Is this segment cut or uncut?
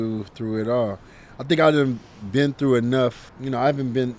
cut